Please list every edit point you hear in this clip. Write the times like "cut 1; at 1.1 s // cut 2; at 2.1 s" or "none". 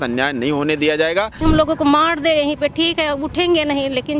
cut 1; at 1.4 s